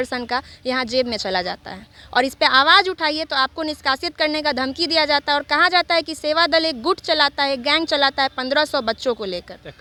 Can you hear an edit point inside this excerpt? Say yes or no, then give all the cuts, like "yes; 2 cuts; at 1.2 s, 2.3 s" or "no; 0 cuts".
no; 0 cuts